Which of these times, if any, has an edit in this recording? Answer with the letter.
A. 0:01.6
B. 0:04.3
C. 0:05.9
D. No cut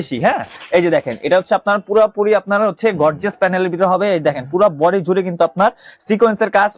D